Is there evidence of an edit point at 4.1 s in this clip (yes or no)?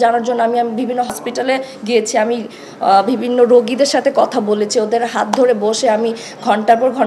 no